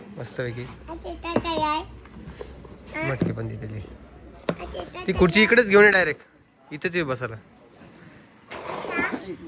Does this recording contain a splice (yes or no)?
no